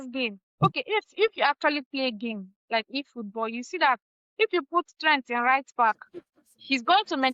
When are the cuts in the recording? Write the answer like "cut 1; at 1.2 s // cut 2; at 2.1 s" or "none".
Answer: none

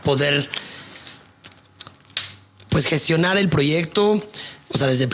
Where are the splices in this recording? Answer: none

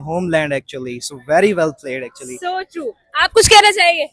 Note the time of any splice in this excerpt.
none

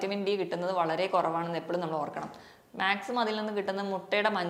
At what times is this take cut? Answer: none

